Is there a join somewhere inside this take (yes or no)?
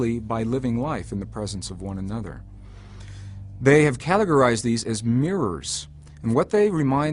yes